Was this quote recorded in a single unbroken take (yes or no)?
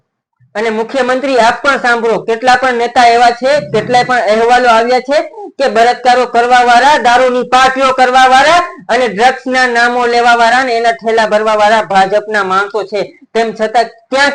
yes